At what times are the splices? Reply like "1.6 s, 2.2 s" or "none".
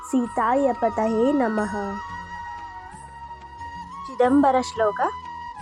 2.0 s, 4.1 s